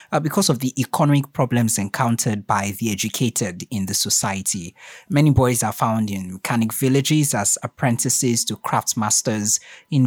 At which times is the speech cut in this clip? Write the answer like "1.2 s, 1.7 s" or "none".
none